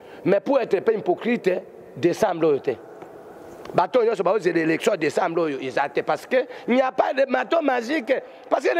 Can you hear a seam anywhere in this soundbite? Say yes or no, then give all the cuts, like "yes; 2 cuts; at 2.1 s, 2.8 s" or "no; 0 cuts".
no; 0 cuts